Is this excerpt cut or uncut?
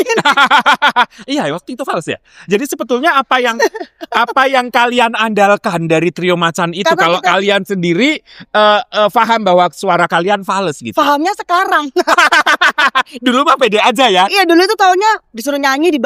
uncut